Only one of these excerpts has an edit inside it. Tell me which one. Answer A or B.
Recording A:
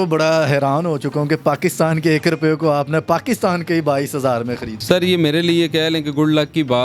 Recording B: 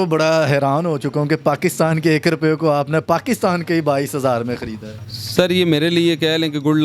A